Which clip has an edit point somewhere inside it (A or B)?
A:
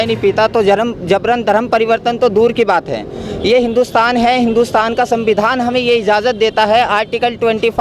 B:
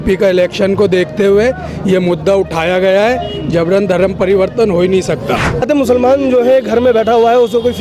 B